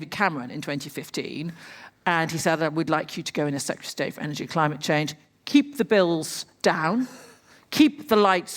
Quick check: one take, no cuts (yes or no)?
no